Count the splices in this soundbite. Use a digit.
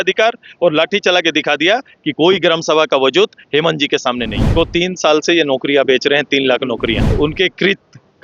2